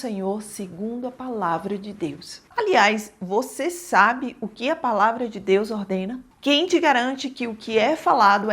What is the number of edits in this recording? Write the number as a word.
two